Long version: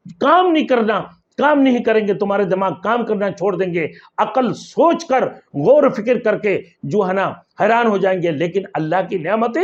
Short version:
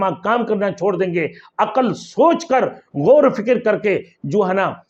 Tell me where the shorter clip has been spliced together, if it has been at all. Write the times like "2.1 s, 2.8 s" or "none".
none